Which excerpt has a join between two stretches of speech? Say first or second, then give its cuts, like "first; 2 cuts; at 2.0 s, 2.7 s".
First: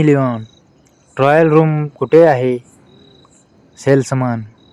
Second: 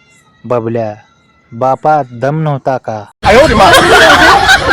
second; 1 cut; at 3.2 s